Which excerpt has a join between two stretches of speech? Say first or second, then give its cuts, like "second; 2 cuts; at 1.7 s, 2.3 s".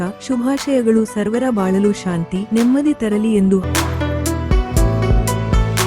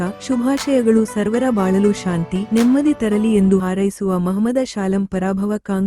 second; 1 cut; at 3.6 s